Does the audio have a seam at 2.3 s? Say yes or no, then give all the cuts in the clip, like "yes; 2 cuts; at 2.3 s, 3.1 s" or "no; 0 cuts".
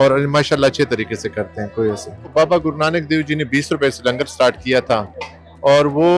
yes; 1 cut; at 2.3 s